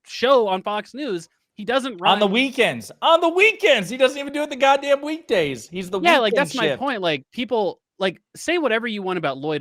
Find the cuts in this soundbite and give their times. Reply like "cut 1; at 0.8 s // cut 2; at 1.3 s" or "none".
none